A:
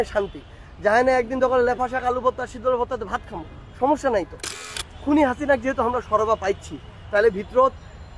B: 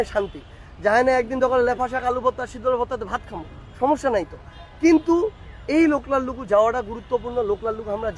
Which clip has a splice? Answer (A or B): A